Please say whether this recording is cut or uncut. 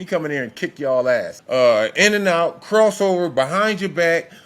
cut